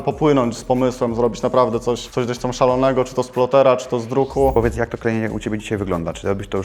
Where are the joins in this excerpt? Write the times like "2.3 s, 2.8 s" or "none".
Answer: 4.5 s

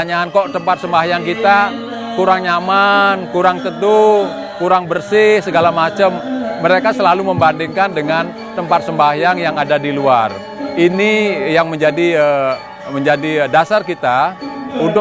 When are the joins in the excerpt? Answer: none

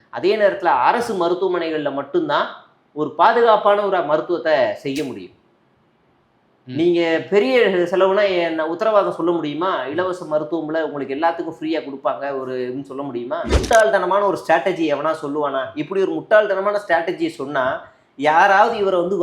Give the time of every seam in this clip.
13.6 s

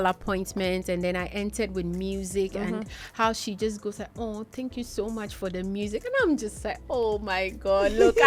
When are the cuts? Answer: none

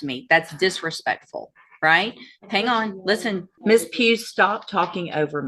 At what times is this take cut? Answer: 3.5 s

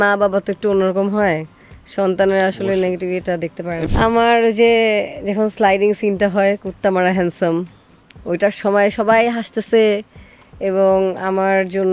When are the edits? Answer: 3.9 s

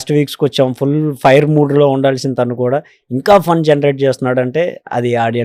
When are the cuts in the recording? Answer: none

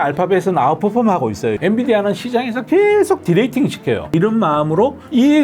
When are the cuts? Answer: 1.5 s, 4.1 s

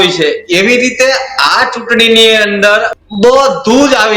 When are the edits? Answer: 3.0 s

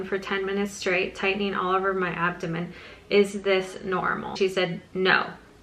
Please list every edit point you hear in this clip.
4.4 s

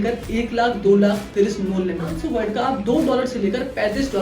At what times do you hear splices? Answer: 2.2 s

